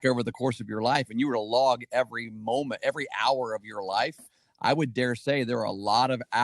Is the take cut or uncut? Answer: uncut